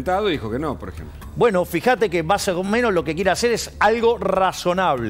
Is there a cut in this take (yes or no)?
no